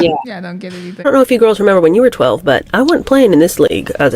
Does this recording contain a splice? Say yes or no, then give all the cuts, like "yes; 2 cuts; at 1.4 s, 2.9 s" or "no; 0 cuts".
yes; 1 cut; at 1.0 s